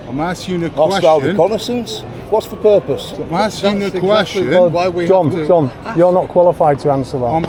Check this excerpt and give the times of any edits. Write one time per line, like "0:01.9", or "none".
none